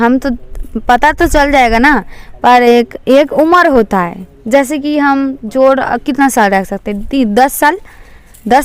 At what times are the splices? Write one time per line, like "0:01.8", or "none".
none